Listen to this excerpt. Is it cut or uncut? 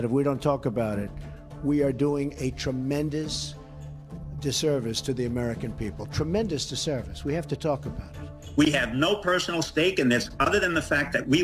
uncut